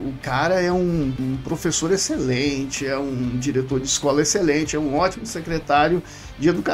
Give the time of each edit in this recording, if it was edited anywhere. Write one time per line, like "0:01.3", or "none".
0:01.2